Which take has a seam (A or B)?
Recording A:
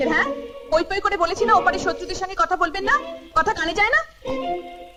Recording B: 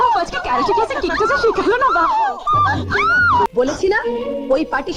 B